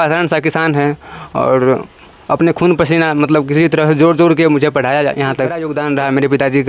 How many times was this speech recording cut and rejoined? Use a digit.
1